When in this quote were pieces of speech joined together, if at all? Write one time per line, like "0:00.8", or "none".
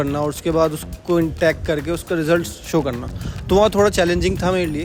none